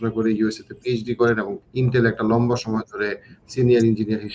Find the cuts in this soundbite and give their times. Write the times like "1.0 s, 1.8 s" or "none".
1.6 s